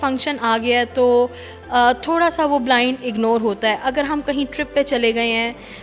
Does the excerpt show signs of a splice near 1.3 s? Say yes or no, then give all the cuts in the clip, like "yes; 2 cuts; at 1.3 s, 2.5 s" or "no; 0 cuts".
no; 0 cuts